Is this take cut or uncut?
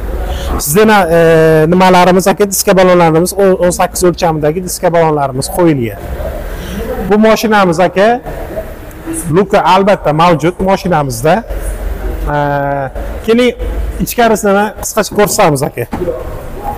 uncut